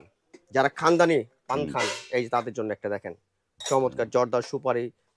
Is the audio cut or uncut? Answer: uncut